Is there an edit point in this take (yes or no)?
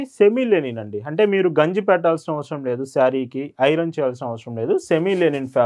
no